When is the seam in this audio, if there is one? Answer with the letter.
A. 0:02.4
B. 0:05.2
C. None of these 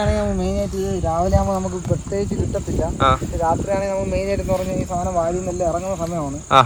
C